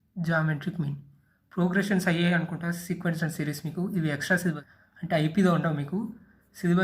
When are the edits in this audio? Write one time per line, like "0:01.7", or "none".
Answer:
0:04.6